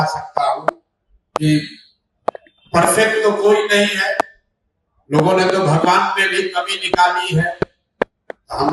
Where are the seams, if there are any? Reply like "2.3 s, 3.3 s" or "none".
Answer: none